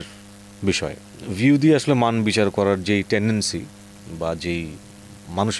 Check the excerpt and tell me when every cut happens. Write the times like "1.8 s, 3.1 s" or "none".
none